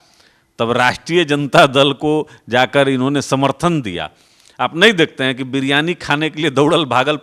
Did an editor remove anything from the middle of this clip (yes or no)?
no